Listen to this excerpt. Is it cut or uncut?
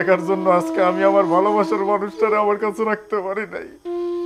uncut